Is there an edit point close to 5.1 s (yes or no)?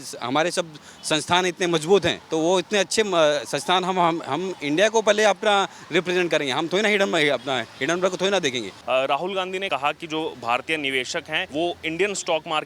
no